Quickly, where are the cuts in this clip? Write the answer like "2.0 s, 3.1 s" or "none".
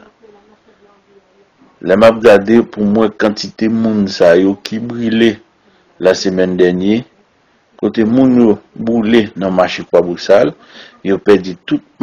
2.7 s

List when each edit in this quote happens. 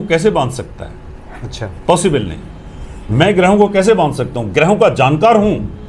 none

